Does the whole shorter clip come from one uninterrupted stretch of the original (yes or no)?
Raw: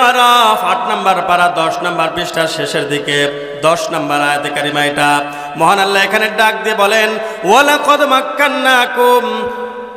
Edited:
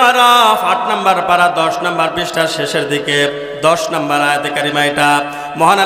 yes